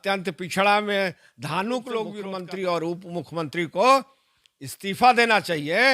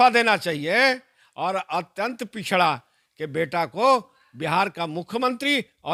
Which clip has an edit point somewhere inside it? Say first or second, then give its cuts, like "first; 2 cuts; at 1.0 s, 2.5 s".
first; 1 cut; at 2.3 s